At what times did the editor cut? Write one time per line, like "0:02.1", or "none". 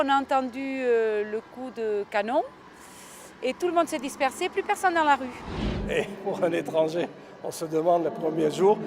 0:05.6